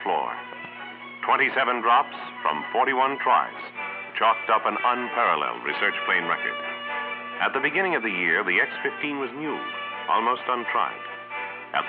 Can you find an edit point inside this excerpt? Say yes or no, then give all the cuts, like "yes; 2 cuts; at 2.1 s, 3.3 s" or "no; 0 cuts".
no; 0 cuts